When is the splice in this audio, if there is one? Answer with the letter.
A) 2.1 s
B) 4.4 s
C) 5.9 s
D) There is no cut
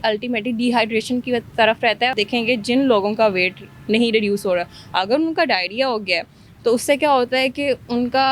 A